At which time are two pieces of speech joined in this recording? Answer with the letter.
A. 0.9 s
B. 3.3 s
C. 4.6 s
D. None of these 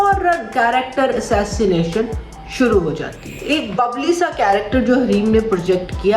B